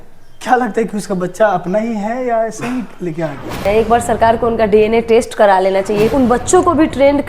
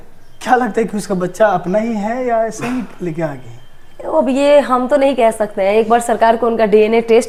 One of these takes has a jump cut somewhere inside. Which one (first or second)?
first